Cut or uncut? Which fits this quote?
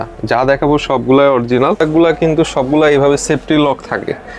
cut